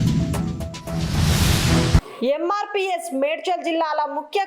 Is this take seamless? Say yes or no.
no